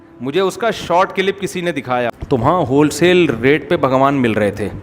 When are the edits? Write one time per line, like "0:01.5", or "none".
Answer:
0:02.2